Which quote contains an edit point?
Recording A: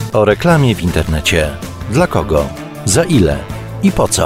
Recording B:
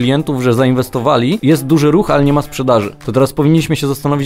B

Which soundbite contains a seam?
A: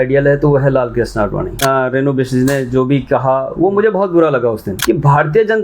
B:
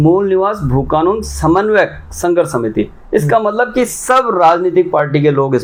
A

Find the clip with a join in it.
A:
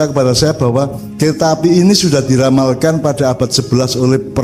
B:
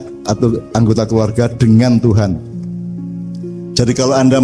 B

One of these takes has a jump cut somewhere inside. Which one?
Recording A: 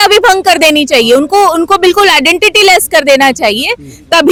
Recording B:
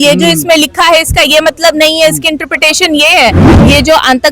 B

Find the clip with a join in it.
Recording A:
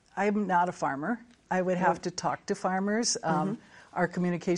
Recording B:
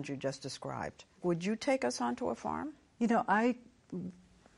B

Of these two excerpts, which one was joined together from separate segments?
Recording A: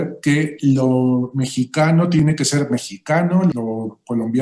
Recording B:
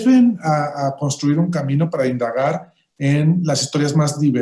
A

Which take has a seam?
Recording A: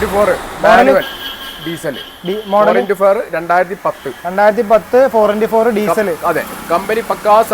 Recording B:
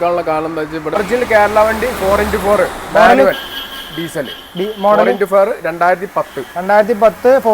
B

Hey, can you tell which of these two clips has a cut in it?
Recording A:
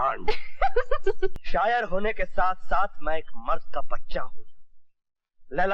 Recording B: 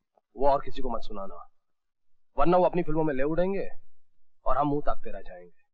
A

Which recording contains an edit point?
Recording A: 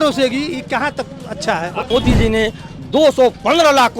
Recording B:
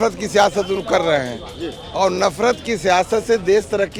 A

